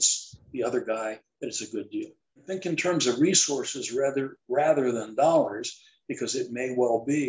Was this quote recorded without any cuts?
no; 1 cut; at 2.6 s

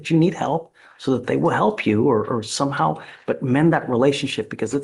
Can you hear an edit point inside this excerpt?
no; 0 cuts

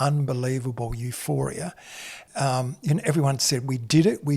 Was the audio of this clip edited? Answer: yes; 1 cut; at 2.2 s

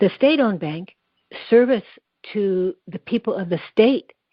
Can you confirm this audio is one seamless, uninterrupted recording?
yes; 0 cuts

